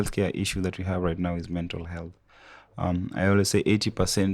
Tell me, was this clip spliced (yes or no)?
no